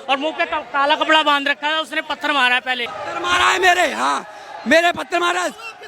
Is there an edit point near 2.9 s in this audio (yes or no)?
yes